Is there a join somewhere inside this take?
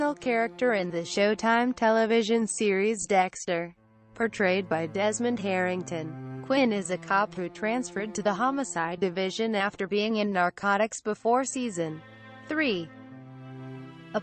no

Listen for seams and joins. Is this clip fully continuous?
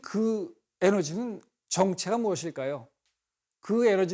yes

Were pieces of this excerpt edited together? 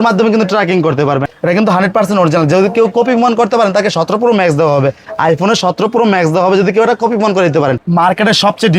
yes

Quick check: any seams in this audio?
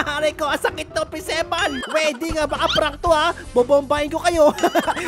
yes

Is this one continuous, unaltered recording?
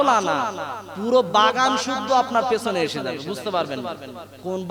yes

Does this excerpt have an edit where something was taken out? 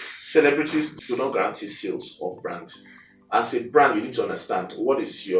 yes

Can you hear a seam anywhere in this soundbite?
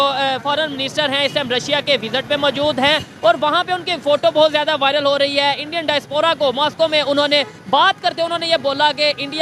no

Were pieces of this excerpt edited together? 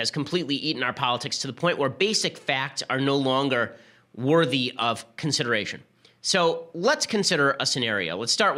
no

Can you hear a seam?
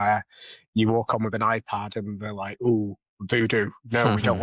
no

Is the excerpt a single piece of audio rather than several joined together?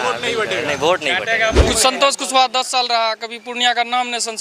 no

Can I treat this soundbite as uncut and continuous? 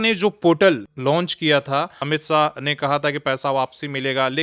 no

